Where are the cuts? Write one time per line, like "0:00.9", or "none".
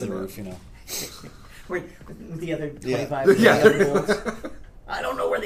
none